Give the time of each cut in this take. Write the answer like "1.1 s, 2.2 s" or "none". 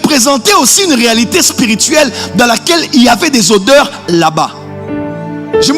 none